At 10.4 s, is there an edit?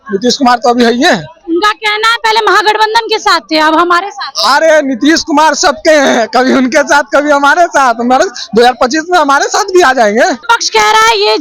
yes; 1 cut; at 10.4 s

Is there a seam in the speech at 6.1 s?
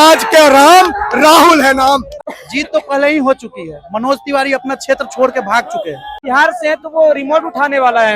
yes; 2 cuts; at 2.1 s, 6.1 s

